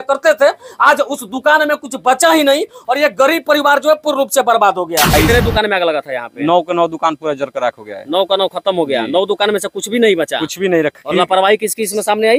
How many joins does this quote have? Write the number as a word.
one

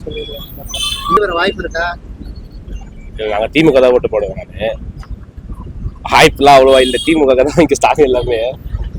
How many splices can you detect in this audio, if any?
one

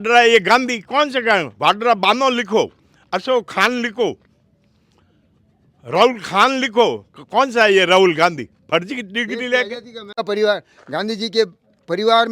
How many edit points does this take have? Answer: one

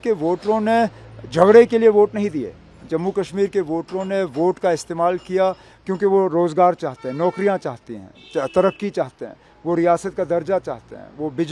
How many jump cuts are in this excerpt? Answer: zero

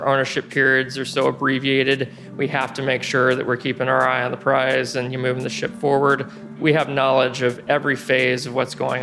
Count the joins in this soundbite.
one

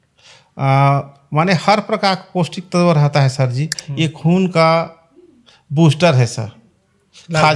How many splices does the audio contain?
one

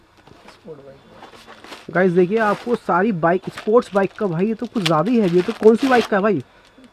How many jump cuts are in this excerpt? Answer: zero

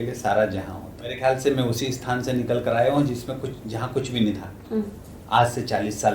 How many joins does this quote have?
one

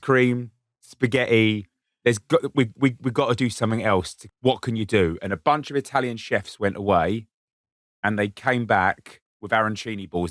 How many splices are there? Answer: one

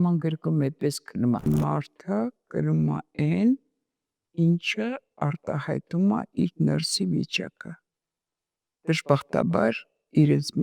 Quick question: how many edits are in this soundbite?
one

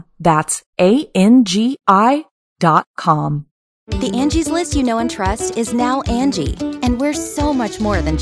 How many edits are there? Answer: one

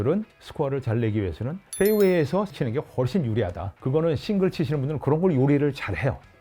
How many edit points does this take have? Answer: three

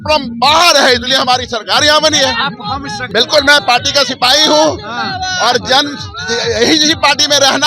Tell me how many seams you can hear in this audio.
one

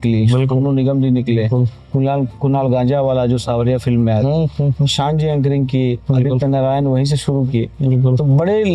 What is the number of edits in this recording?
zero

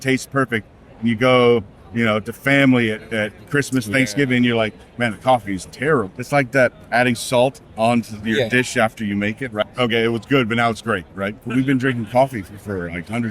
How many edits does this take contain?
three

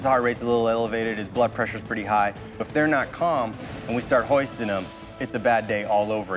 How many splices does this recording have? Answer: one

